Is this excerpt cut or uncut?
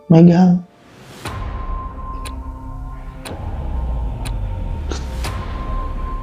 uncut